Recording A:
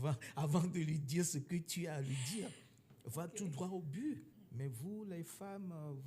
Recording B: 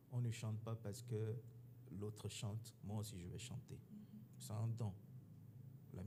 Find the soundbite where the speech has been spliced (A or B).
A